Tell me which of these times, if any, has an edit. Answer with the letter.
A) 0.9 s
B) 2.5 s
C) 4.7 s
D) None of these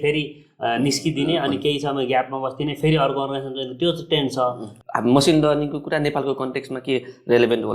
C